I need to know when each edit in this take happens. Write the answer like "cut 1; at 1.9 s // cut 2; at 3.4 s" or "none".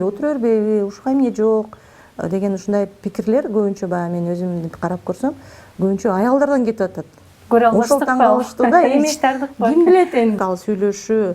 cut 1; at 10.4 s

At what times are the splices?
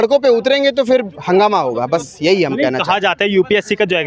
none

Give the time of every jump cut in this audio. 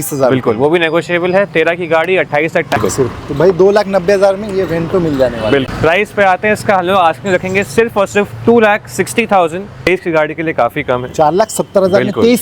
cut 1; at 2.8 s // cut 2; at 5.7 s // cut 3; at 9.8 s

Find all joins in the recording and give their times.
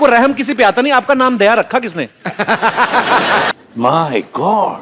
cut 1; at 3.5 s

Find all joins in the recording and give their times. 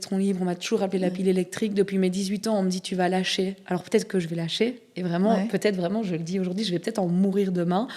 none

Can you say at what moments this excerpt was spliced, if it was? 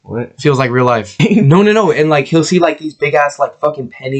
cut 1; at 1.2 s

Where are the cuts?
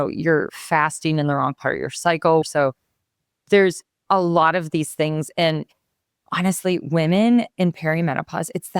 cut 1; at 2.4 s

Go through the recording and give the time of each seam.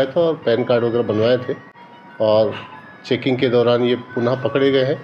none

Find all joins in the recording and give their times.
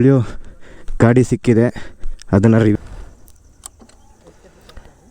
cut 1; at 2.7 s

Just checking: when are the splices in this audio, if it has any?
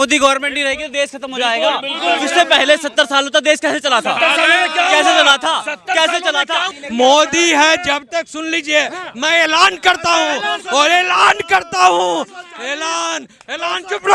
cut 1; at 6.7 s

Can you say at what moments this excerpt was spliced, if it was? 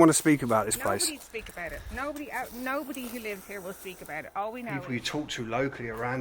cut 1; at 4.7 s

